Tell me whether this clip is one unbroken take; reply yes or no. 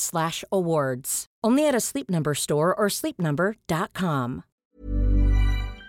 no